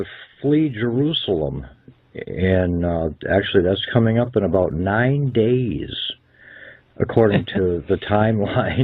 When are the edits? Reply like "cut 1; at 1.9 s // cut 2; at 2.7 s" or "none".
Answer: cut 1; at 3.8 s